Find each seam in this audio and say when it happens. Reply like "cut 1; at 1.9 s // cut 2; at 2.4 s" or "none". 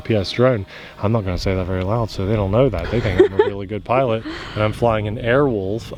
none